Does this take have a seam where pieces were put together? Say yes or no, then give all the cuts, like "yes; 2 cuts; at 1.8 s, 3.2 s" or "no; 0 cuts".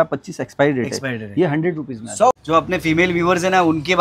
yes; 1 cut; at 2.3 s